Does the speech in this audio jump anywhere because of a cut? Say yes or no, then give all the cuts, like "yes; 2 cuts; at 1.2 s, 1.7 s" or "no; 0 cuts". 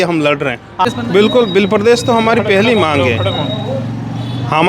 yes; 1 cut; at 0.9 s